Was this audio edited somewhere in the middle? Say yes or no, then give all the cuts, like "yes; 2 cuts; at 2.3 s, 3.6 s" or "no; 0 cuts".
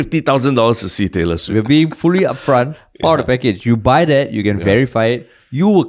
yes; 1 cut; at 1.5 s